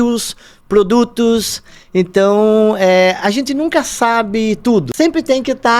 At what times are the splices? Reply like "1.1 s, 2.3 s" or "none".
4.9 s